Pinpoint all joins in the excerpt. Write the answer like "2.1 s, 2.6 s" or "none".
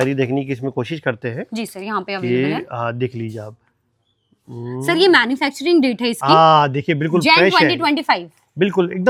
none